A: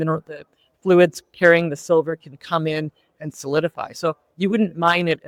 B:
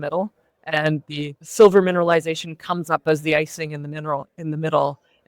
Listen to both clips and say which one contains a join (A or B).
B